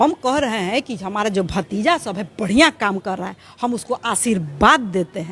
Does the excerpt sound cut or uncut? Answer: uncut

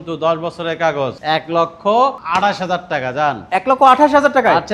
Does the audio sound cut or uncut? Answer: uncut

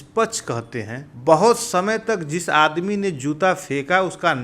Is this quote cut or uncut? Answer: cut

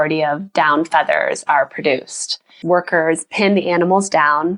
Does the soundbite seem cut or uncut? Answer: cut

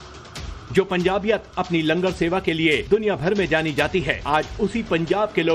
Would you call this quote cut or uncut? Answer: uncut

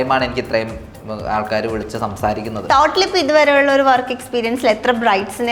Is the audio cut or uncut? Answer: cut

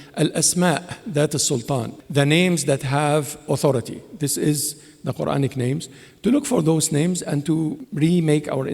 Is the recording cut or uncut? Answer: cut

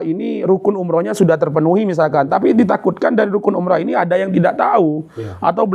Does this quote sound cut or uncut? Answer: uncut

